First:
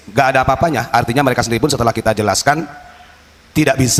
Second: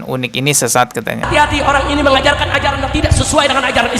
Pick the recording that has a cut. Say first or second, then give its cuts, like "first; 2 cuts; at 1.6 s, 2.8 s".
second; 1 cut; at 1.2 s